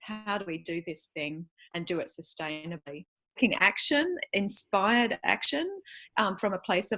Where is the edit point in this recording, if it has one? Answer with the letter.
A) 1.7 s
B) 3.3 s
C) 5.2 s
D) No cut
B